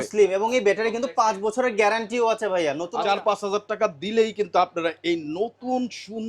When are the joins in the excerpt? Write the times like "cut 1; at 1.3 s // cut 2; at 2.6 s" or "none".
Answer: cut 1; at 2.9 s